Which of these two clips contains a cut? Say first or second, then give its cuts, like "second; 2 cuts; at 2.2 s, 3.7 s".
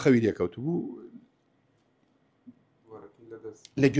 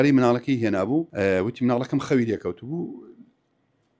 second; 1 cut; at 1.1 s